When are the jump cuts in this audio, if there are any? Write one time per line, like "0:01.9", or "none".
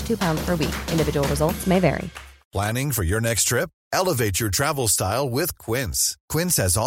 0:02.5